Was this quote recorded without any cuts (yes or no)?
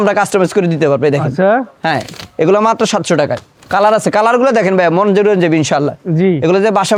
yes